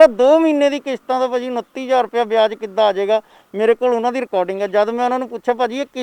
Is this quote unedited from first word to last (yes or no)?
yes